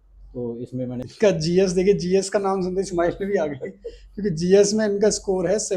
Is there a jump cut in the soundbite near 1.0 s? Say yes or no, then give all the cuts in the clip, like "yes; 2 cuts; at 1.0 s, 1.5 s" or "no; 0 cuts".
yes; 1 cut; at 1.0 s